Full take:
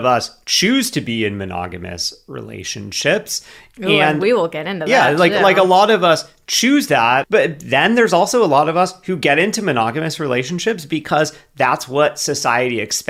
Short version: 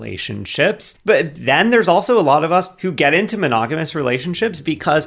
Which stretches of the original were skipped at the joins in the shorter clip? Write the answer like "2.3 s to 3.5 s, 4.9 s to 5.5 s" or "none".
3.5 s to 7.3 s

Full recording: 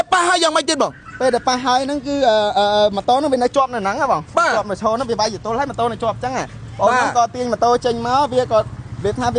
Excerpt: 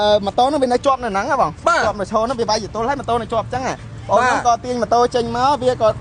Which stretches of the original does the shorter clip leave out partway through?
none

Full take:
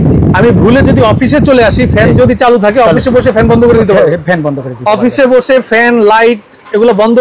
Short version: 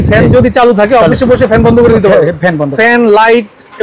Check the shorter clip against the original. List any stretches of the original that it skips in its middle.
4.6 s to 5.7 s

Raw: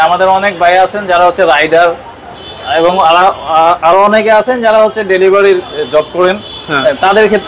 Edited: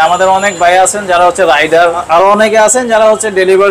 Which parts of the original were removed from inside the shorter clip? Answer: 2.0 s to 3.8 s

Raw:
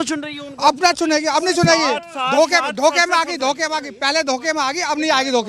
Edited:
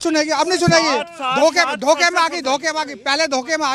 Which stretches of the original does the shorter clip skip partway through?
none

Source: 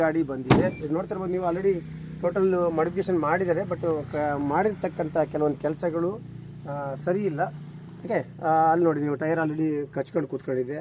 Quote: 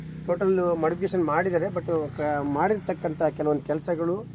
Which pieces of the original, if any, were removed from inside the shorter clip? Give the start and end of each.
none

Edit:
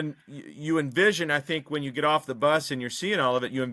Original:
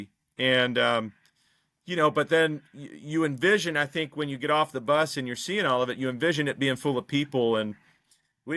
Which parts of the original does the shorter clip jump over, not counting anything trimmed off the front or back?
none

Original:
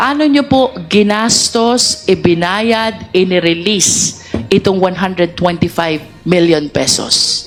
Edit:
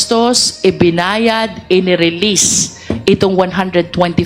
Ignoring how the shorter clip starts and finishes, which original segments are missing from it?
none

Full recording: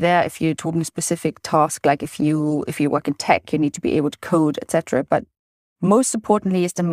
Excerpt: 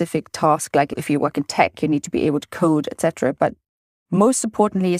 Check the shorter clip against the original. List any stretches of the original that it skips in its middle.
2.1 s to 2.7 s

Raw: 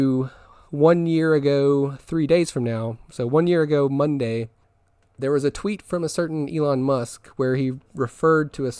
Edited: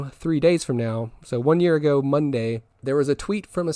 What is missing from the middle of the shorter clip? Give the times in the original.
4.6 s to 5.1 s

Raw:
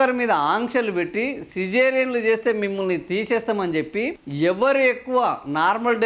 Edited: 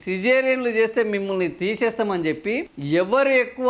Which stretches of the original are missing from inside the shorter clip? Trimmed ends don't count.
none

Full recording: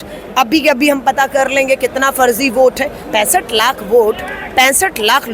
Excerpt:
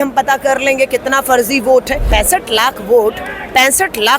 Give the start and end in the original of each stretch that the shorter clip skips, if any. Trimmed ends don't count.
2.9 s to 3.0 s

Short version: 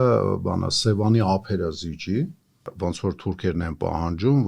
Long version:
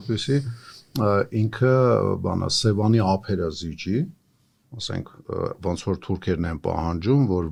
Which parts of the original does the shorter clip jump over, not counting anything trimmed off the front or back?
4.5 s to 5.6 s

